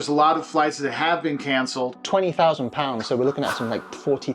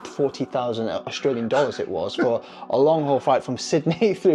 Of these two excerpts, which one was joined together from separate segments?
first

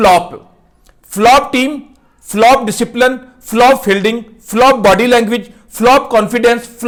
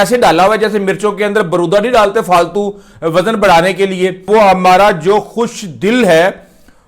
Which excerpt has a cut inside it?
second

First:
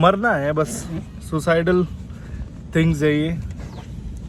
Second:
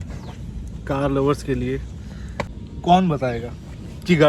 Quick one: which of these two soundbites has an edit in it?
second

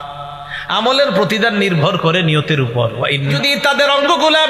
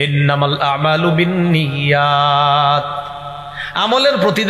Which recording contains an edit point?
first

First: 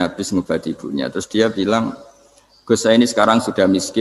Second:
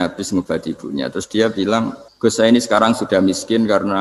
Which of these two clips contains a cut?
second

